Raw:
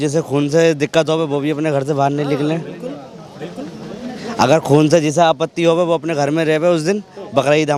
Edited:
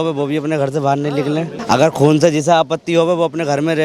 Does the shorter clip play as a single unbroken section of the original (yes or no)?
no